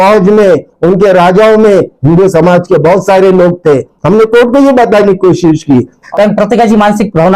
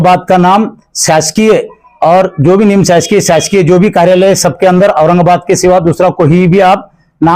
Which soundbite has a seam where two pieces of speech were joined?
first; 1 cut; at 6.0 s

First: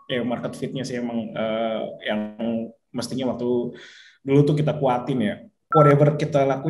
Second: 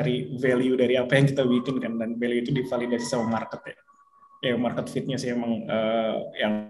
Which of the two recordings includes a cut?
first; 1 cut; at 5.7 s

